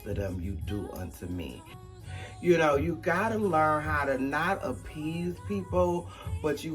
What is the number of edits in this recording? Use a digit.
1